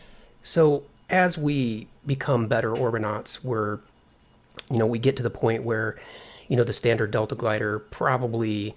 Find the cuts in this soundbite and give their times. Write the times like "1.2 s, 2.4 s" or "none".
5.7 s